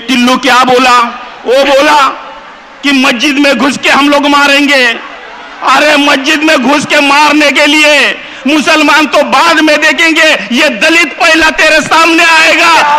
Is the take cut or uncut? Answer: cut